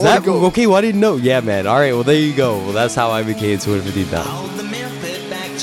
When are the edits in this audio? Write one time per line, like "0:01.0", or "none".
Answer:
0:04.2